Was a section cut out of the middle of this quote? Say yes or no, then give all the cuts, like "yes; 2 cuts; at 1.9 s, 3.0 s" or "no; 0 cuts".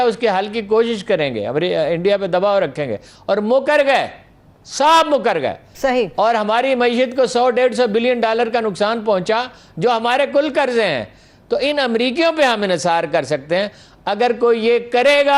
no; 0 cuts